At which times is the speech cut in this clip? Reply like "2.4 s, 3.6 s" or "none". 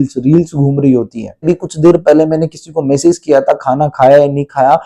1.5 s